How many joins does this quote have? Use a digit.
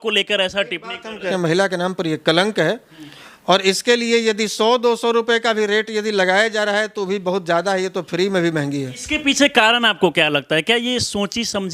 2